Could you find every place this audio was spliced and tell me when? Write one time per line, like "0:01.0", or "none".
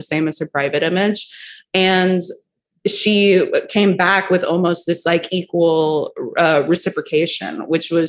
none